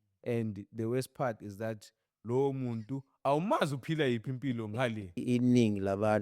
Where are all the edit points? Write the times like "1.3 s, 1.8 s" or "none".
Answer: 5.2 s